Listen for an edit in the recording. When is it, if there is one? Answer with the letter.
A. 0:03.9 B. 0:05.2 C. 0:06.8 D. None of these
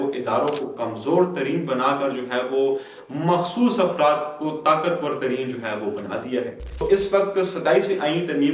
C